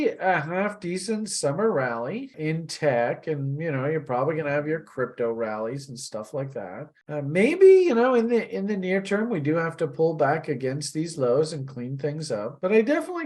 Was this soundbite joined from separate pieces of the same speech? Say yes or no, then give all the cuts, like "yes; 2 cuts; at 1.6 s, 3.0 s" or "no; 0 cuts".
yes; 1 cut; at 2.3 s